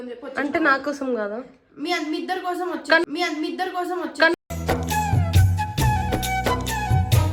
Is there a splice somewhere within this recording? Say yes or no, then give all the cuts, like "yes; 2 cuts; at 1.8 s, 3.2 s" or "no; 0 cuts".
no; 0 cuts